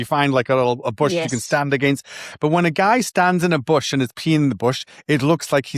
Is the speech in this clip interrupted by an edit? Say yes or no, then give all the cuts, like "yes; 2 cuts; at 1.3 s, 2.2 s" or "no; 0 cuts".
no; 0 cuts